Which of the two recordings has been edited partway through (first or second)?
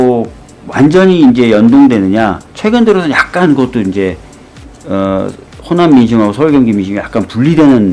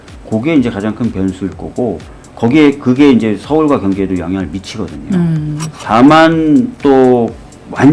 second